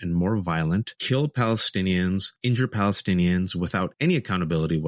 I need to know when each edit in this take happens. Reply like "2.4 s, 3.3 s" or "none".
1.0 s, 2.3 s, 3.9 s